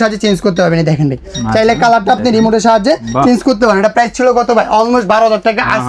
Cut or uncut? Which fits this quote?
uncut